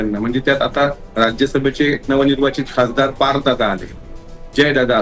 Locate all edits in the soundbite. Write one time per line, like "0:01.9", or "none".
none